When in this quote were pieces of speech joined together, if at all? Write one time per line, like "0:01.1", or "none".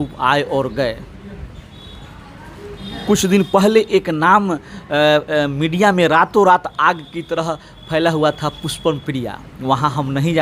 none